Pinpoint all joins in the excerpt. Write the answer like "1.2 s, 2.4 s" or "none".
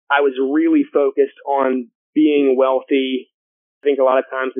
1.9 s, 3.7 s